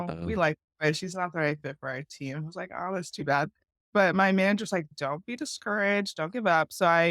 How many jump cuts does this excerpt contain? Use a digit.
2